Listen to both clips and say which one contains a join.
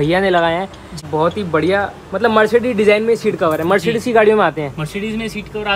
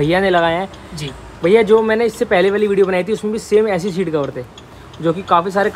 first; 1 cut; at 1.0 s

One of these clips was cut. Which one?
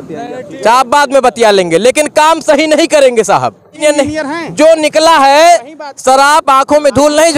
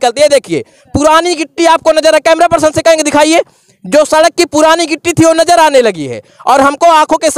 first; 1 cut; at 3.7 s

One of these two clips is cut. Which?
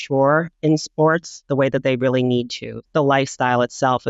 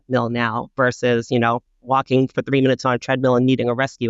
first; 2 cuts; at 1.3 s, 2.8 s

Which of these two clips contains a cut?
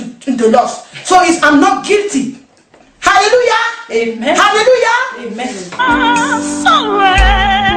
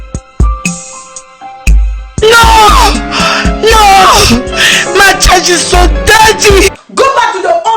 second; 1 cut; at 6.8 s

